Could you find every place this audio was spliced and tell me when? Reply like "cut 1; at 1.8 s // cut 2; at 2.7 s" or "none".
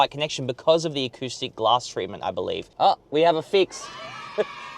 cut 1; at 2.7 s